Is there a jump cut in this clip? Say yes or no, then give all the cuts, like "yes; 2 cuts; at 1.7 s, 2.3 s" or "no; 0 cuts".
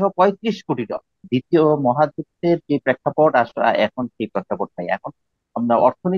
yes; 1 cut; at 1.2 s